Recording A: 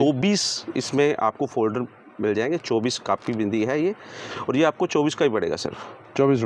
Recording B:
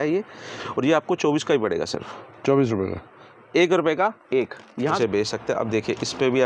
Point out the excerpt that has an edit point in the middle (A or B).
B